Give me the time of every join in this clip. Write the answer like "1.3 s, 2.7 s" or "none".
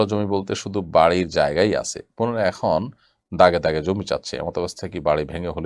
none